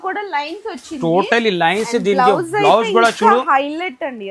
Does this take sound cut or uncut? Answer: uncut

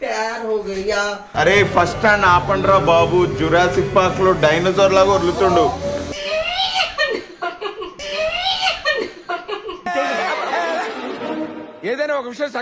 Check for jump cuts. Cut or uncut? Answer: cut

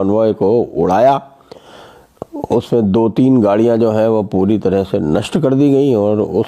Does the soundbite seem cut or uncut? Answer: uncut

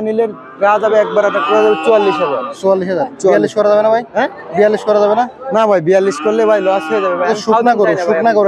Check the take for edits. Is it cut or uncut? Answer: uncut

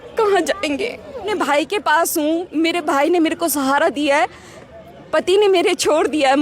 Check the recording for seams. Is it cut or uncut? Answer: cut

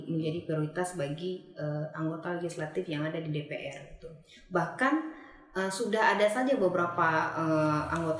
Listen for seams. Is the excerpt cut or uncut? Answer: uncut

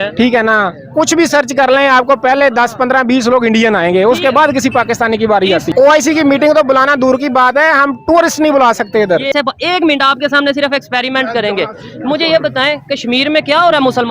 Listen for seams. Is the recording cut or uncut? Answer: cut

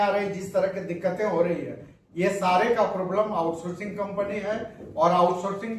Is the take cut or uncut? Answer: uncut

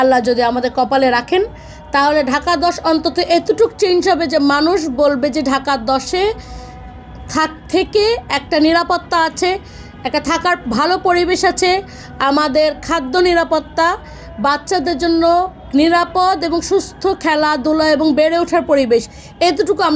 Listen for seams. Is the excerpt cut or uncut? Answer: uncut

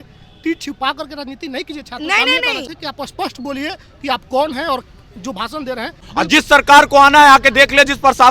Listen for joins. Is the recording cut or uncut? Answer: cut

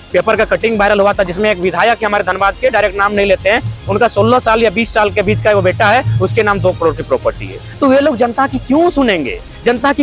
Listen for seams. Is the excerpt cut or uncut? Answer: uncut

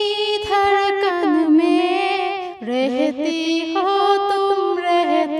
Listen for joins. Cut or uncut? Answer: uncut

